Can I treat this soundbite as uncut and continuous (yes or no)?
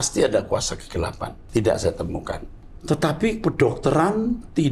no